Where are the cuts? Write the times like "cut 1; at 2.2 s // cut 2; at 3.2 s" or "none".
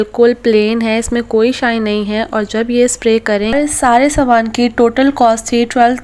cut 1; at 3.5 s

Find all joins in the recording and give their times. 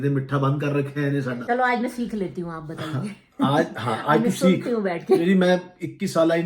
cut 1; at 1.4 s

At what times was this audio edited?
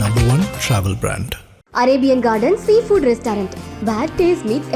none

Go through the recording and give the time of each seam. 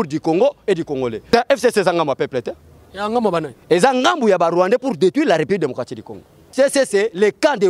cut 1; at 1.2 s // cut 2; at 6.5 s

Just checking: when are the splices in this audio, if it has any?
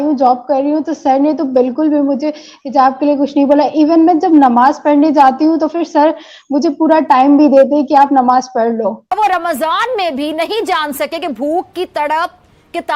cut 1; at 9.1 s

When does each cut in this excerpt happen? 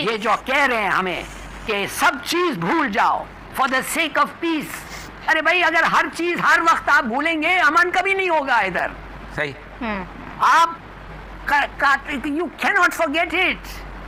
none

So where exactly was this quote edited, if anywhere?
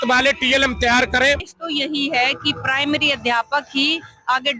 cut 1; at 1.5 s

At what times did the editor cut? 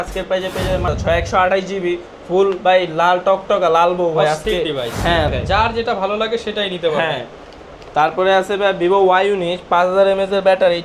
cut 1; at 0.9 s // cut 2; at 5.3 s

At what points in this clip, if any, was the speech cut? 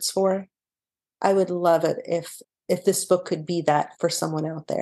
cut 1; at 2.3 s // cut 2; at 3.9 s

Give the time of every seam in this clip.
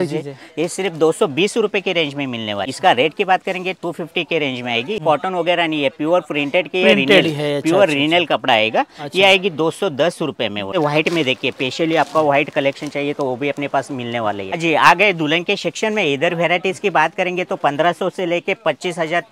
cut 1; at 2.7 s // cut 2; at 5.0 s // cut 3; at 10.7 s // cut 4; at 14.5 s

